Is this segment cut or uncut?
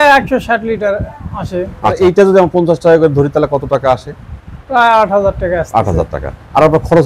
cut